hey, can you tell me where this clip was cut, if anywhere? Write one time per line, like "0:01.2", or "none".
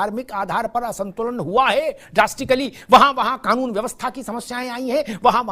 none

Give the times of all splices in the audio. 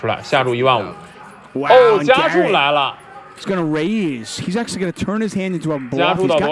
0:01.0
0:02.9

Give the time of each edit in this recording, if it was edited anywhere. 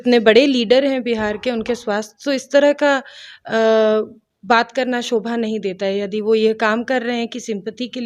none

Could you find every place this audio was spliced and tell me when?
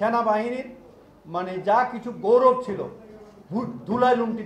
none

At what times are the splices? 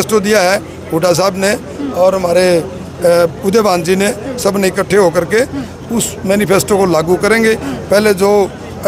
none

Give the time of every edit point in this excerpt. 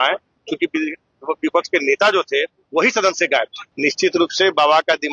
0:03.6

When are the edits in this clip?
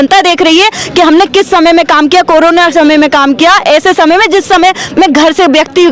none

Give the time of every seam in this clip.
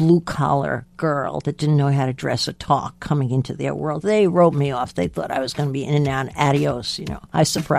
none

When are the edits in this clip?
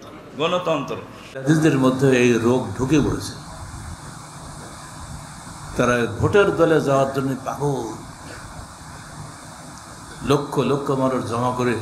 0:01.3

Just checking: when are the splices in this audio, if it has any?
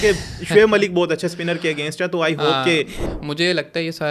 0:03.0

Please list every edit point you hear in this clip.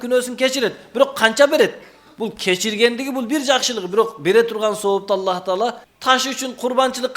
0:05.9

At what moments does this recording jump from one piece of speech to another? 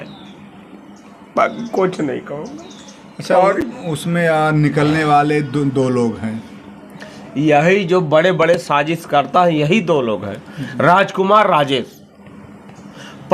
none

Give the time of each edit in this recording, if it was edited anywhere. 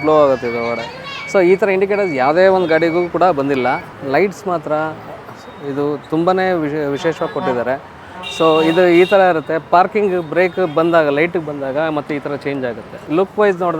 0:03.9
0:12.9

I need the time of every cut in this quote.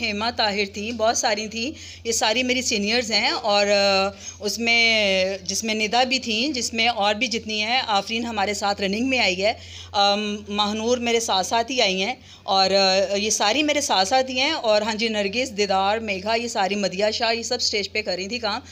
none

